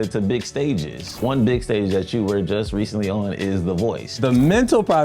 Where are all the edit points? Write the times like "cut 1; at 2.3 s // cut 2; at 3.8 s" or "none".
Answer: cut 1; at 1.2 s // cut 2; at 4.1 s